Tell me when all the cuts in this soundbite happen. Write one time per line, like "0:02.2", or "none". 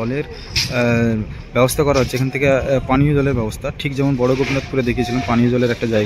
none